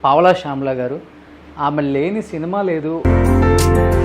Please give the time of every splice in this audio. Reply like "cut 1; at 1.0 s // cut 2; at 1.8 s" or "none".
cut 1; at 3.0 s

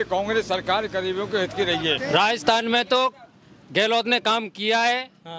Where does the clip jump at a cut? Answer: cut 1; at 2.0 s

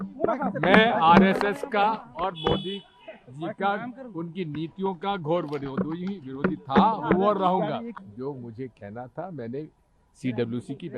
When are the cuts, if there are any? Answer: cut 1; at 7.8 s

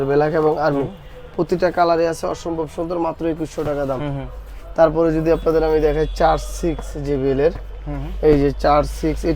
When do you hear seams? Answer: none

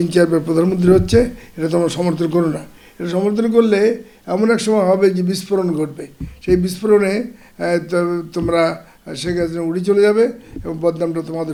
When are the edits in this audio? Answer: none

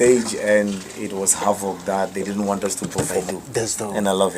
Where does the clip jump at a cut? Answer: cut 1; at 3.3 s

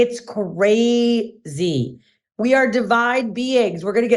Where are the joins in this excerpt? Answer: cut 1; at 2.1 s

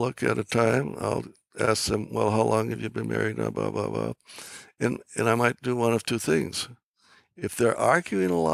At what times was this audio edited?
none

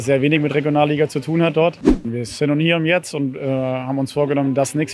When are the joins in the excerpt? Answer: cut 1; at 2.0 s

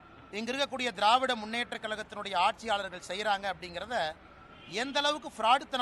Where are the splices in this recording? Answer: none

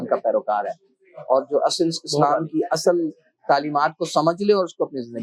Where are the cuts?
none

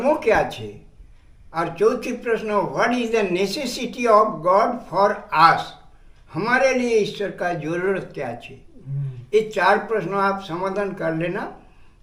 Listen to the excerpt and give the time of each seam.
none

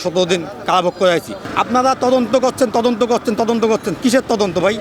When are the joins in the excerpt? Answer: cut 1; at 1.4 s

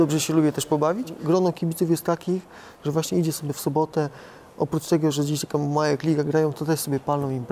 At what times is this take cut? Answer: cut 1; at 1.2 s

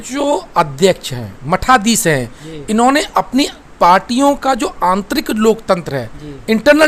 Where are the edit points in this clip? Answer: none

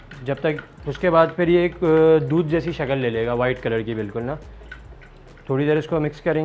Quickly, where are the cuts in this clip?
none

